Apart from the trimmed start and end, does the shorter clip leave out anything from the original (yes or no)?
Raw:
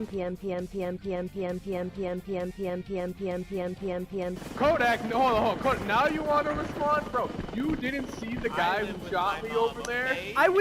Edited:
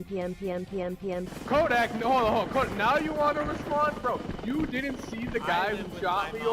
yes